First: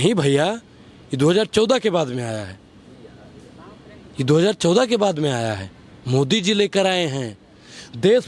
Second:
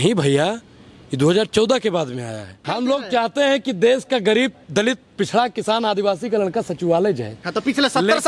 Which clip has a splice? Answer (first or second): second